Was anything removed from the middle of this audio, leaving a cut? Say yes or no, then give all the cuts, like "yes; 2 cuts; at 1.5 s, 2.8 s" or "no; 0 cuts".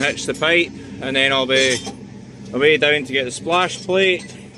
no; 0 cuts